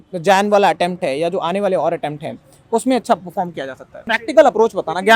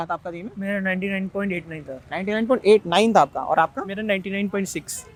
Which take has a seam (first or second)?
first